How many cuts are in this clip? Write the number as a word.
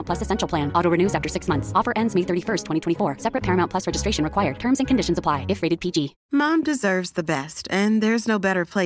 one